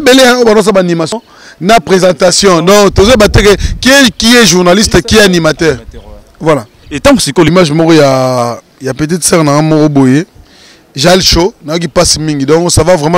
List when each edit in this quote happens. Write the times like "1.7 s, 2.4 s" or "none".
1.1 s, 7.5 s